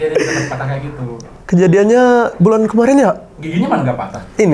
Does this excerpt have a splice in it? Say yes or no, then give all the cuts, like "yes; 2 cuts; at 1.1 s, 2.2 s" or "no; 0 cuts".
yes; 1 cut; at 3.4 s